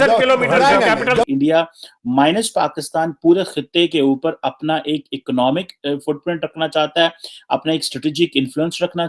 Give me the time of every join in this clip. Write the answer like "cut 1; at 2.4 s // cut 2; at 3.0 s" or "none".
cut 1; at 1.2 s